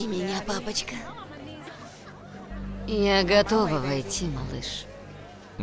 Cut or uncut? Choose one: uncut